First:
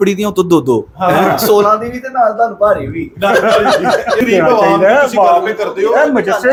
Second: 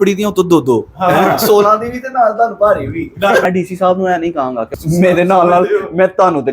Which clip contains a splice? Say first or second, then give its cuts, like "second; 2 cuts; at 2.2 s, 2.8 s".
second; 2 cuts; at 3.4 s, 4.7 s